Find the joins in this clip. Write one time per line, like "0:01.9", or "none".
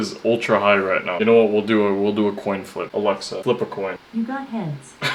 0:02.8
0:04.0